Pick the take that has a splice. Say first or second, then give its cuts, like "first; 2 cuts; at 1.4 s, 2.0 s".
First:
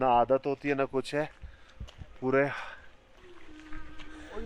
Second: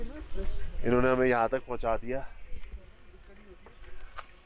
first; 1 cut; at 3.2 s